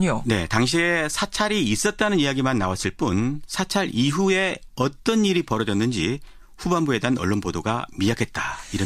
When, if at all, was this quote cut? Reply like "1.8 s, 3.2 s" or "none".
4.6 s